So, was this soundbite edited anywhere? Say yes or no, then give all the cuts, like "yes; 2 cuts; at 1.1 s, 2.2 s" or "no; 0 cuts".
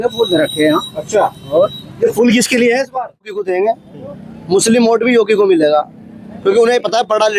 yes; 1 cut; at 3.4 s